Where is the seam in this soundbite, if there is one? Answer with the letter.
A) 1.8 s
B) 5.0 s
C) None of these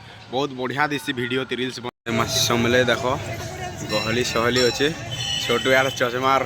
A